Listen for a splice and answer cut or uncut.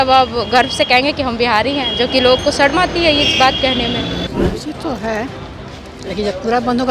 cut